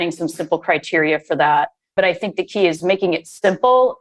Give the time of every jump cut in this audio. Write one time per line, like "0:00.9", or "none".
0:01.8
0:02.8

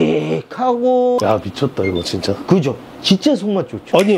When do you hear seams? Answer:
0:01.2

